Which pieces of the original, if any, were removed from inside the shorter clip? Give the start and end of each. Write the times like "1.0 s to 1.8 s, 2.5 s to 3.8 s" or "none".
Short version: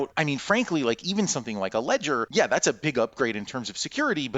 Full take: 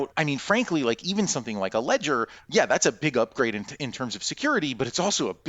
2.3 s to 2.4 s, 3.7 s to 4.0 s